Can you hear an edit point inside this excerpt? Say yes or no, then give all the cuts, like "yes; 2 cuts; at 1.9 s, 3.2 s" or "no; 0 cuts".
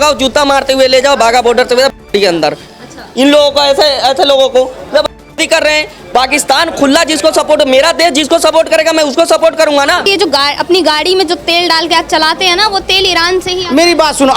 yes; 1 cut; at 10.1 s